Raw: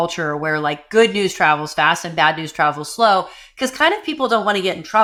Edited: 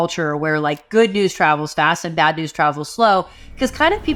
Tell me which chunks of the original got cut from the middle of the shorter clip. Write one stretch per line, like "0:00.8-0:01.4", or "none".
none